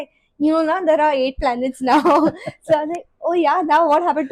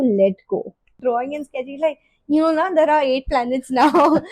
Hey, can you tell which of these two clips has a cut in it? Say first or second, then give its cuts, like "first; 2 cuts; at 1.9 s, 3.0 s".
second; 1 cut; at 1.0 s